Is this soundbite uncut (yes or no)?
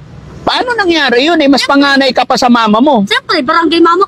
yes